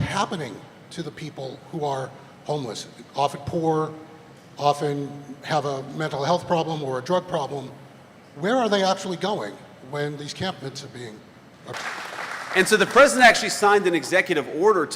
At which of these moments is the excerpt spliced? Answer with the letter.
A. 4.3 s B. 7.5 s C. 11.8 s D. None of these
C